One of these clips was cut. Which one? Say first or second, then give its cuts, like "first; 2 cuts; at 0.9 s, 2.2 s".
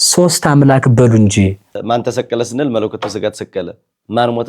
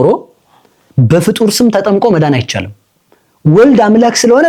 first; 1 cut; at 1.7 s